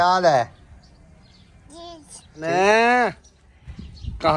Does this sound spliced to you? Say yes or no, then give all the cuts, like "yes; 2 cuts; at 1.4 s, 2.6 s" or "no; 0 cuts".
yes; 1 cut; at 2.5 s